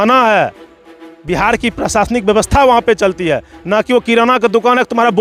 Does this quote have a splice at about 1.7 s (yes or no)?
no